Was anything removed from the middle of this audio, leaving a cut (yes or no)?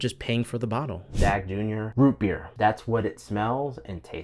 yes